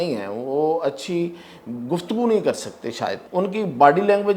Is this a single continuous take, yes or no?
no